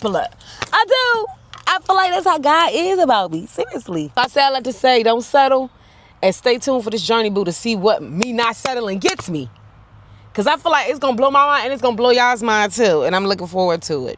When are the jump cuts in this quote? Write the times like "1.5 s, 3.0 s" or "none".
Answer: none